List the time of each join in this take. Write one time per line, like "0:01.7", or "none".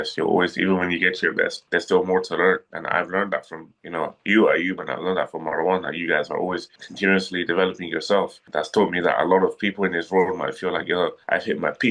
none